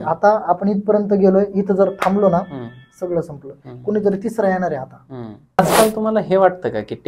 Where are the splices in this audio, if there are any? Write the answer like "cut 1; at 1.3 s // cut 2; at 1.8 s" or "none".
cut 1; at 5.6 s